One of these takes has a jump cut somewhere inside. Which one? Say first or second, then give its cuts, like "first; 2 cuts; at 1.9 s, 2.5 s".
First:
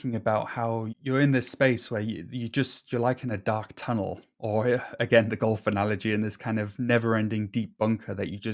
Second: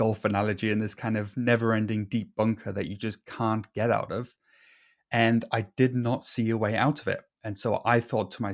first; 1 cut; at 0.9 s